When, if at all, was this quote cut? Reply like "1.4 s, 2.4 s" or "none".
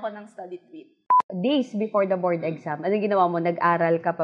1.1 s